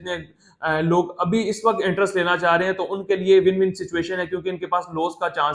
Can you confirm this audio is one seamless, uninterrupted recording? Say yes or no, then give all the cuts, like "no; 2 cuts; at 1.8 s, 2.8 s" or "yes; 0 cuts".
yes; 0 cuts